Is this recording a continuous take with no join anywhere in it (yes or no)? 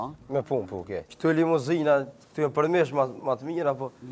no